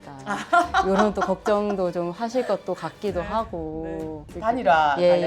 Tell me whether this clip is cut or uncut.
cut